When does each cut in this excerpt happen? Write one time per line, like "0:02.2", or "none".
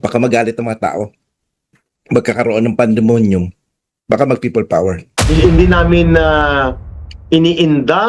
0:05.1